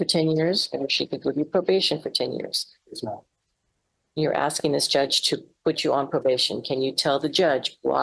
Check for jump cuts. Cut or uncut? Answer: uncut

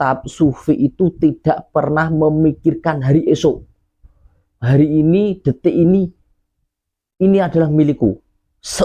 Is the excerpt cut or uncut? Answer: uncut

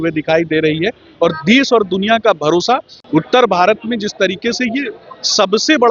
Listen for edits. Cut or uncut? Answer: cut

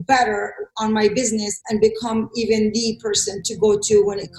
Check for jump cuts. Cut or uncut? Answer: cut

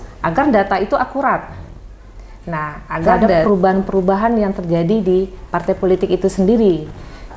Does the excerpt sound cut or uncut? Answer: cut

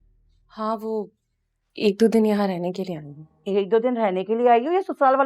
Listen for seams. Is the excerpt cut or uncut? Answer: uncut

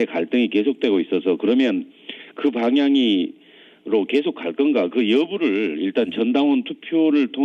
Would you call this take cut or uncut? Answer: uncut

